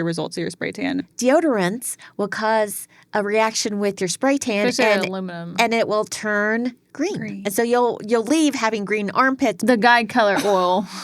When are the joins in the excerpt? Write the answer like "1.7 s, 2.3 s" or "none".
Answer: 1.1 s, 9.6 s